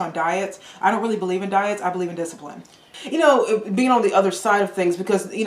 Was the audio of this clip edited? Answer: yes; 1 cut; at 2.9 s

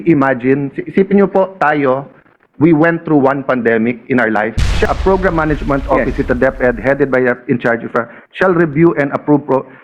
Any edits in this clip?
yes; 1 cut; at 4.9 s

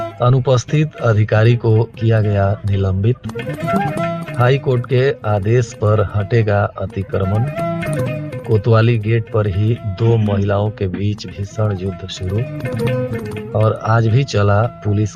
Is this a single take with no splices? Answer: yes; 0 cuts

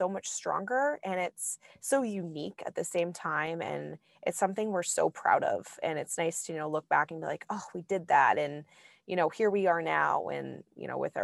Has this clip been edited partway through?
no; 0 cuts

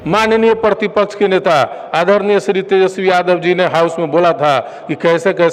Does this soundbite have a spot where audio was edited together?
no; 0 cuts

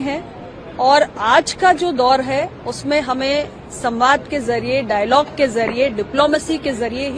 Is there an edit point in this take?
no; 0 cuts

